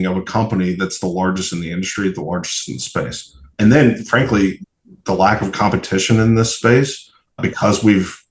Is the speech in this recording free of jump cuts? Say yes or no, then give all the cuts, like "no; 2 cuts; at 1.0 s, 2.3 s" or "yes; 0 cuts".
no; 3 cuts; at 3.5 s, 4.6 s, 7.4 s